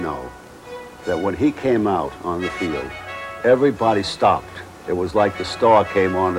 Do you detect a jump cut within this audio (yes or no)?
no